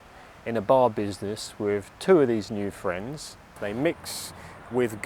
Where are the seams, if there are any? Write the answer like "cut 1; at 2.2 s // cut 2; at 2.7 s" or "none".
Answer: cut 1; at 3.4 s